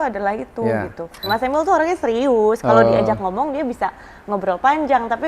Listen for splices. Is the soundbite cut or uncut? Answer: cut